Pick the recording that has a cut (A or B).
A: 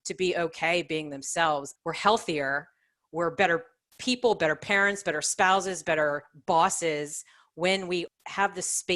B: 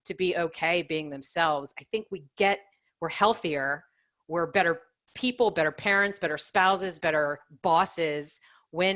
A